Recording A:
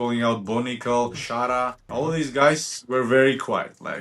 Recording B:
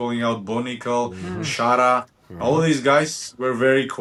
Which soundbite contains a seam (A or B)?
A